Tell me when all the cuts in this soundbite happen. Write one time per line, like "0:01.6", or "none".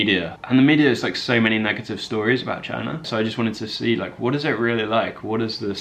0:03.0

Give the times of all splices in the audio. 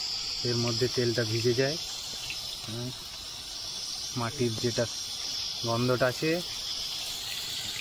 none

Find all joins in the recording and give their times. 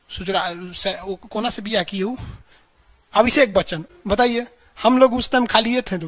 none

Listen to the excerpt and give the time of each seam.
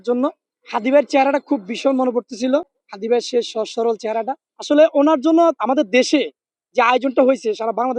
0:04.4

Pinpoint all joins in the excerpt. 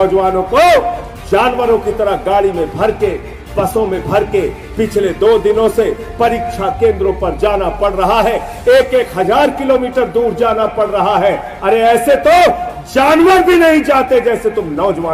none

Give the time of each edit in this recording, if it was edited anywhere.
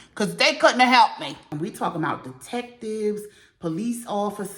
0:01.4

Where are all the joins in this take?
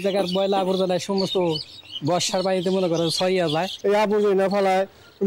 0:03.7

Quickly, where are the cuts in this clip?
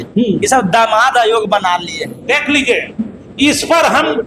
none

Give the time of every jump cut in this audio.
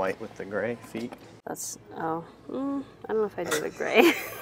none

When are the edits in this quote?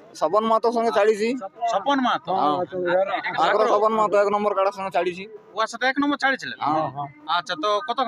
none

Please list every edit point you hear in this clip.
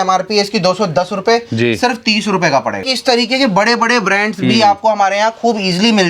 0:02.8

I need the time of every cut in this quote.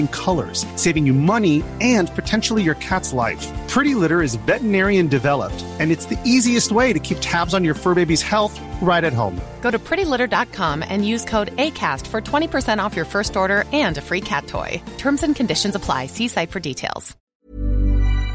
0:17.2

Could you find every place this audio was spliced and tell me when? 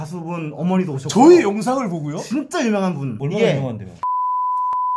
none

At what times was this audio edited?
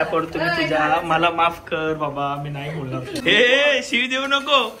0:03.2

